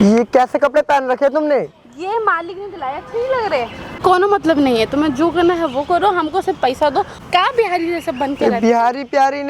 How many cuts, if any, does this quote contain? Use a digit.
2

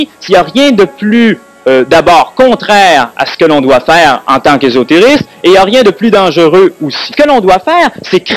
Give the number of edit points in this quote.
1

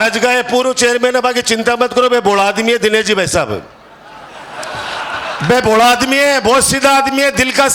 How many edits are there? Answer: 0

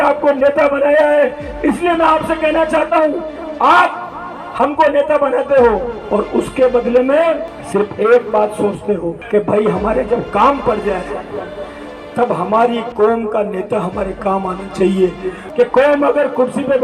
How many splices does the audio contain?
4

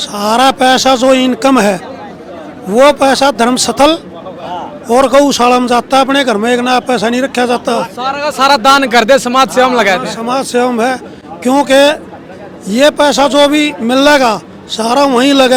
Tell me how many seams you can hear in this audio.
0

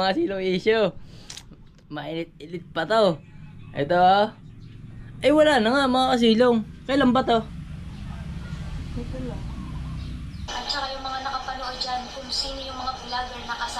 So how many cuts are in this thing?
1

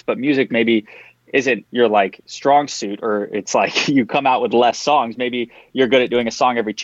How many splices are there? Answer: 2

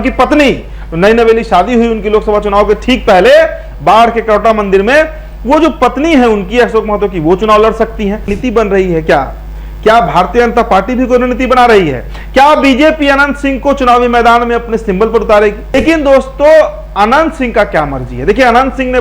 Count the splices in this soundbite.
2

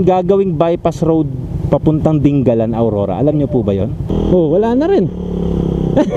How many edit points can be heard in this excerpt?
1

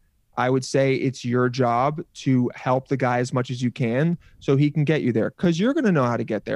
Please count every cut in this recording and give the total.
0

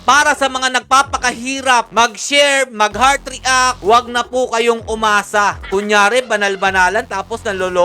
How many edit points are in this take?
2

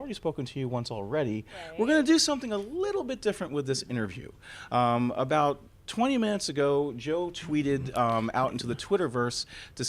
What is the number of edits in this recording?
1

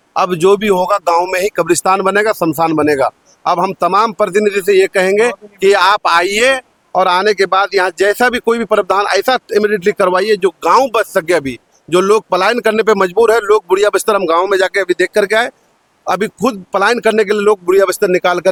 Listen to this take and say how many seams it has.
0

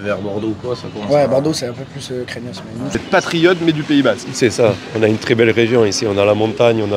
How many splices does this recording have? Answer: 1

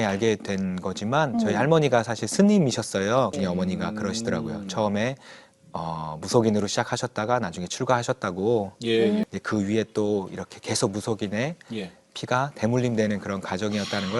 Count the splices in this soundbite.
2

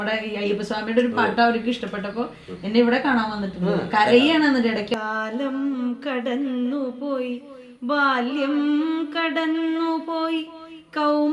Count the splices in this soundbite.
1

